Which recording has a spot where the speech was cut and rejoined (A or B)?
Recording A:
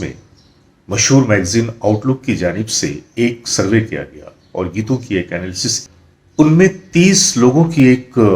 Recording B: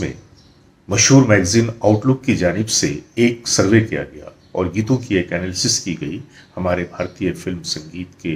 A